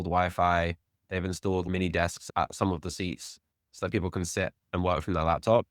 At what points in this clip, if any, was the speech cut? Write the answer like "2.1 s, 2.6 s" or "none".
1.7 s